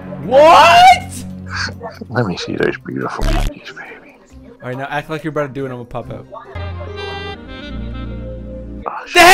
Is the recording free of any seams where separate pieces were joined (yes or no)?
yes